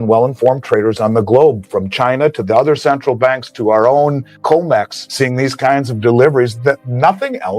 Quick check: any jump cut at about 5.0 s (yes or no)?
yes